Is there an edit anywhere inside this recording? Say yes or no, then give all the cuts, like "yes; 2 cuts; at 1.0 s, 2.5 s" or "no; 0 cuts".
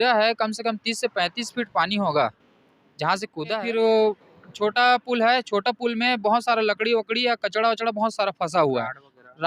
yes; 1 cut; at 3.6 s